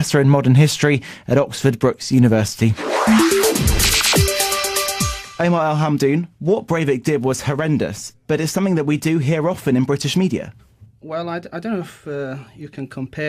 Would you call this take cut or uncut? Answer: cut